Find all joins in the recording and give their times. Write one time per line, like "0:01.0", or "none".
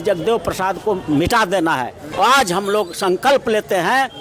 0:02.2